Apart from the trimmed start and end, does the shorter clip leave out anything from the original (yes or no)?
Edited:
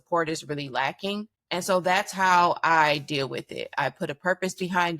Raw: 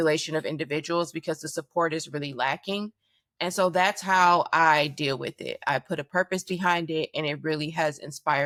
yes